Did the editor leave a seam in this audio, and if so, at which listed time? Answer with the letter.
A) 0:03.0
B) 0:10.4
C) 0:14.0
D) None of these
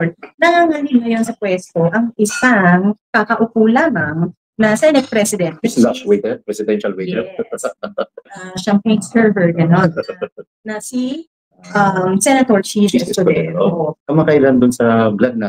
C